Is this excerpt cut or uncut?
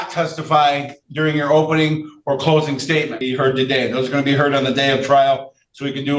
cut